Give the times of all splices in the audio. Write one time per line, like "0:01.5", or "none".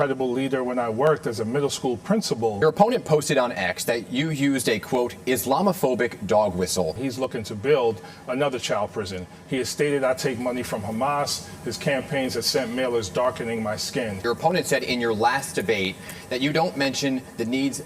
0:02.6
0:07.0
0:14.2